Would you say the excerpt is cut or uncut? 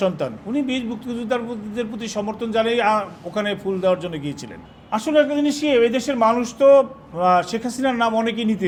uncut